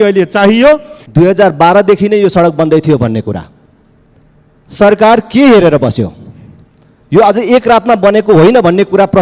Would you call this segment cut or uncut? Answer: cut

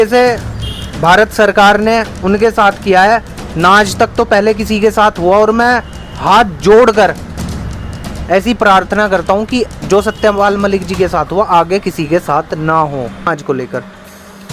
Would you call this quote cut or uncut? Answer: cut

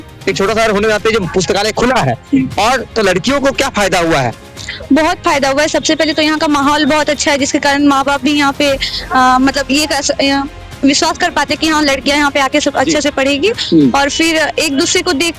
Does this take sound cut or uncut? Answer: uncut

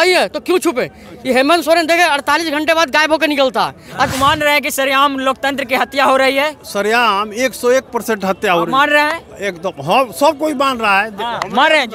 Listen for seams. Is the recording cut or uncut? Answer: cut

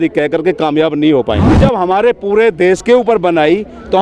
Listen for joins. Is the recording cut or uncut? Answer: cut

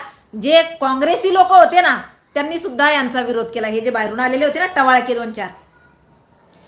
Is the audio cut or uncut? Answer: uncut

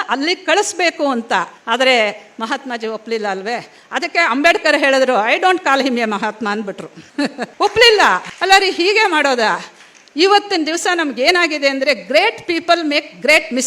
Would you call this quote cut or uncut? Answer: uncut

